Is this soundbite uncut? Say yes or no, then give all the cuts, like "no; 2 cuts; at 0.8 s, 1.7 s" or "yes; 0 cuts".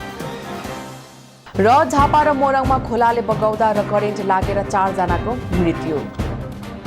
yes; 0 cuts